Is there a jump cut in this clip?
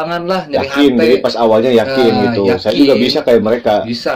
no; 0 cuts

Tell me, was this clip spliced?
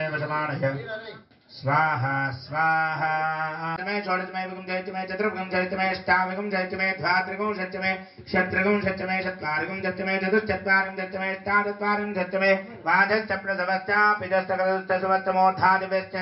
yes; 1 cut; at 3.8 s

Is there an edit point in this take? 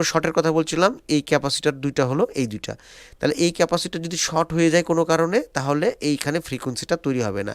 no; 0 cuts

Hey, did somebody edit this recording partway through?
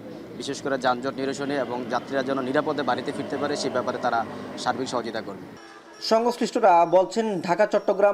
no; 0 cuts

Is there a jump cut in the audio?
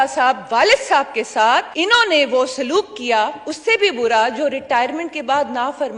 yes; 1 cut; at 1.7 s

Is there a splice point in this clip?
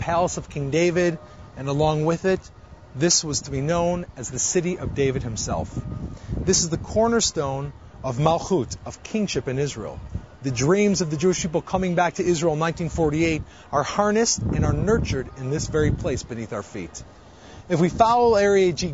yes; 1 cut; at 14.7 s

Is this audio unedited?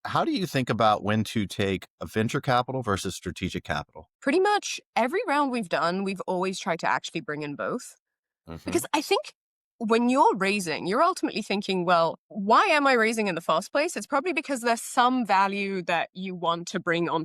no; 1 cut; at 4.1 s

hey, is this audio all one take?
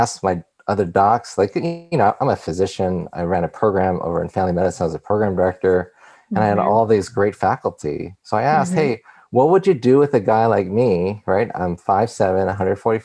yes; 0 cuts

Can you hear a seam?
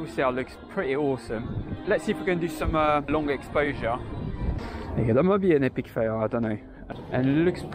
yes; 4 cuts; at 1.7 s, 3.1 s, 4.6 s, 6.8 s

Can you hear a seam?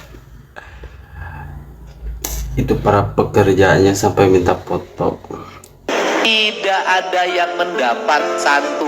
yes; 1 cut; at 5.9 s

